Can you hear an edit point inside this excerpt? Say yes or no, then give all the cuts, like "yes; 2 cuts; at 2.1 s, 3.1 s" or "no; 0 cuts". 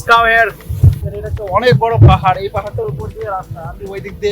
yes; 1 cut; at 1.1 s